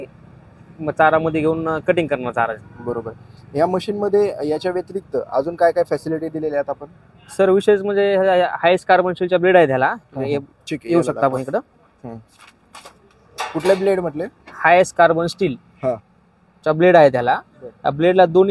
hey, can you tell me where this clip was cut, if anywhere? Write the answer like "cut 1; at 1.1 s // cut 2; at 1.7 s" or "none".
none

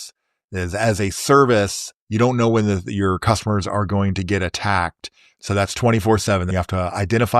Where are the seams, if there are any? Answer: cut 1; at 5.3 s // cut 2; at 6.5 s

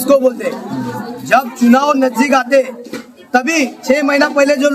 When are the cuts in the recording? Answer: none

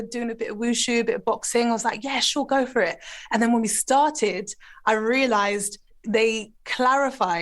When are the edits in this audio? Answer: cut 1; at 5.9 s

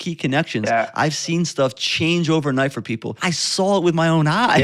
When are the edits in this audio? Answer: cut 1; at 3.2 s

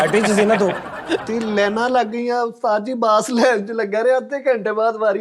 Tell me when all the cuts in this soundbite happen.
cut 1; at 1.2 s

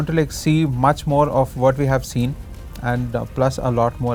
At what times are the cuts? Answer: none

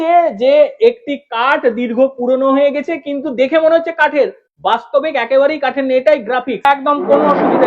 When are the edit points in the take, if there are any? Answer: cut 1; at 6.6 s

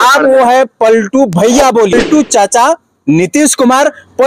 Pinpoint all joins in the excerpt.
cut 1; at 1.9 s

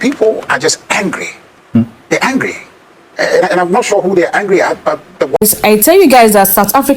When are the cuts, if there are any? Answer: cut 1; at 5.3 s

